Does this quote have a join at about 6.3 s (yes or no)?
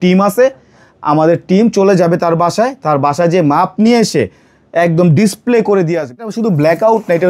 yes